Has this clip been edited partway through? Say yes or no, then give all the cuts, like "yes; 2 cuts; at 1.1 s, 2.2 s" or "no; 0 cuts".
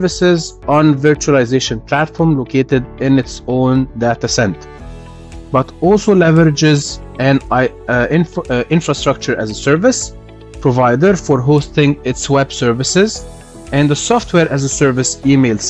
no; 0 cuts